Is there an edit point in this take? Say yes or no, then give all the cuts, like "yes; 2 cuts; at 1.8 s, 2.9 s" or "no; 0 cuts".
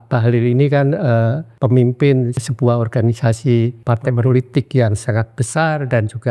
yes; 3 cuts; at 1.4 s, 2.4 s, 3.8 s